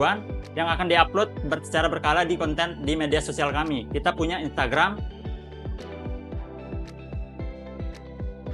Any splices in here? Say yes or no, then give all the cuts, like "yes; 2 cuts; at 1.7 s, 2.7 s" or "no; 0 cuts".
yes; 1 cut; at 5.0 s